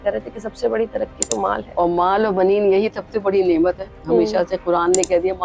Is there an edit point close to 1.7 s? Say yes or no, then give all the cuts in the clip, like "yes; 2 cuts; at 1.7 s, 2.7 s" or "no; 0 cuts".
yes; 1 cut; at 1.7 s